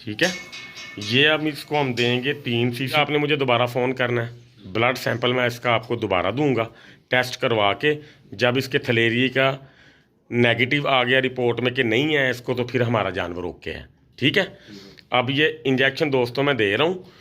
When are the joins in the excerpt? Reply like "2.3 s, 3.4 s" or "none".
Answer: 2.9 s